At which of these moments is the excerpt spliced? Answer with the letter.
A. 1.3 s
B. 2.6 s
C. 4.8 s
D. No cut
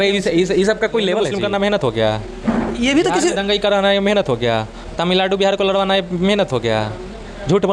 A